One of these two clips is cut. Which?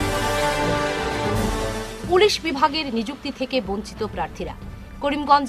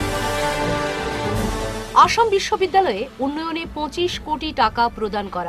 first; 1 cut; at 1.6 s

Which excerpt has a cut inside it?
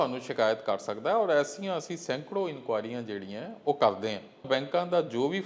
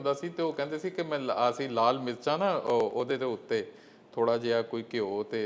first; 1 cut; at 4.5 s

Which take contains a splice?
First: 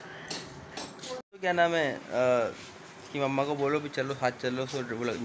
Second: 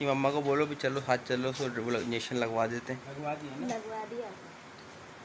first; 1 cut; at 1.3 s

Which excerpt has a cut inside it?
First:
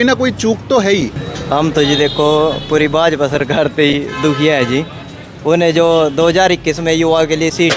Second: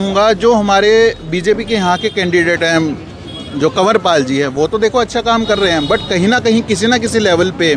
first; 1 cut; at 1.3 s

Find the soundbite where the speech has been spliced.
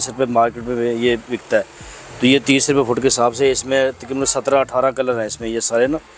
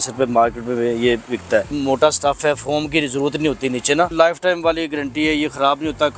second; 2 cuts; at 1.7 s, 4.1 s

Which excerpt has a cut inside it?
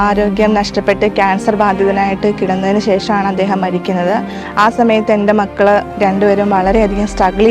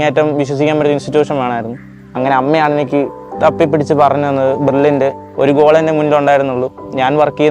second; 1 cut; at 5.2 s

